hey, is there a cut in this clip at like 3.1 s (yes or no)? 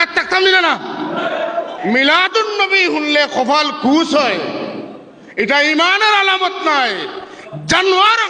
no